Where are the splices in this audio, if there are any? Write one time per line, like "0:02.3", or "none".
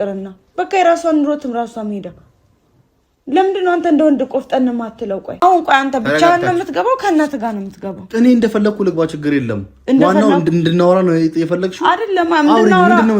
0:05.4